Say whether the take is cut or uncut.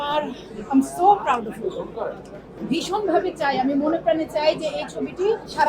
cut